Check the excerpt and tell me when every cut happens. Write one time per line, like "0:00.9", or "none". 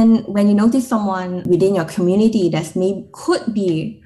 0:01.4